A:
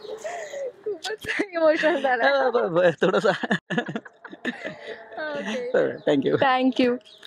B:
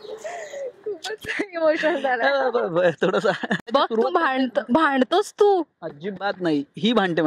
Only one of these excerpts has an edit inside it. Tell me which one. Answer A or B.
B